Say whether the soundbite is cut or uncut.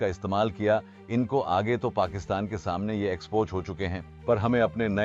uncut